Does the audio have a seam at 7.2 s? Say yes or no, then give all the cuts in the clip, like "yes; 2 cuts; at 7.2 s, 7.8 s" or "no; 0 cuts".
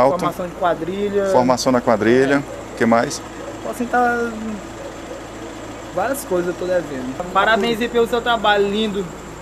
yes; 1 cut; at 7.2 s